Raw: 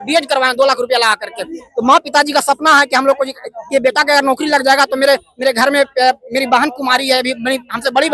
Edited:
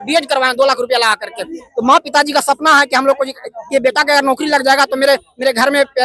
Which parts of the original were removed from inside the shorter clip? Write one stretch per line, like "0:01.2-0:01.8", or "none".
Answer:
none